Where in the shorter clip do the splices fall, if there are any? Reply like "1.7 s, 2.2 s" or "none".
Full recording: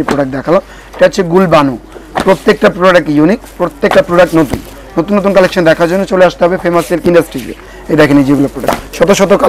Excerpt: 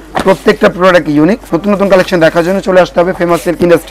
1.5 s